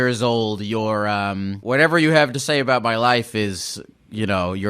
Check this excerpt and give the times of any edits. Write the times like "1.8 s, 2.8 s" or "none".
1.6 s